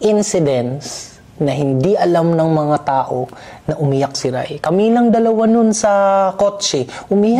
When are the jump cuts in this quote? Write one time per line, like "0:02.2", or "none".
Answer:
none